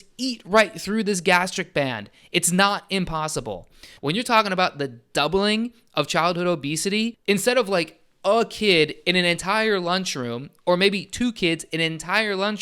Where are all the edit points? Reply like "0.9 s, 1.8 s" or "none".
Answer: 3.8 s, 7.2 s